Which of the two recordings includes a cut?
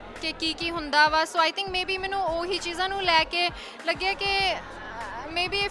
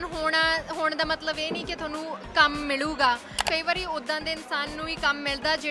second; 1 cut; at 3.4 s

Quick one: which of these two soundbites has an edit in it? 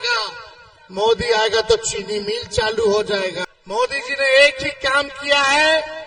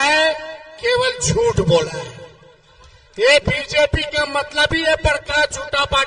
first; 1 cut; at 3.5 s

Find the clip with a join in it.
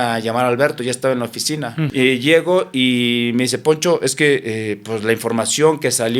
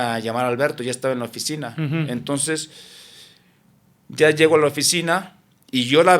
first; 1 cut; at 1.9 s

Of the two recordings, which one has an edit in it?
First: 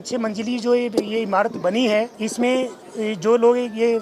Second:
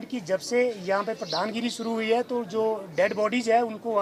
first; 2 cuts; at 2.1 s, 2.8 s

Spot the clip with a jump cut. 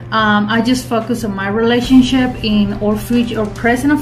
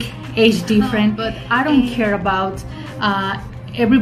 second; 1 cut; at 1.3 s

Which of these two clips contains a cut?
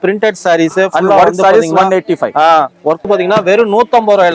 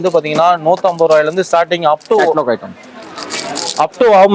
first; 1 cut; at 3.1 s

